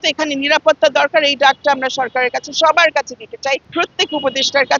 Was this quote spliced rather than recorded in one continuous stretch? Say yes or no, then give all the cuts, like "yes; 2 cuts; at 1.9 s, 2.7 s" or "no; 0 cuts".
no; 0 cuts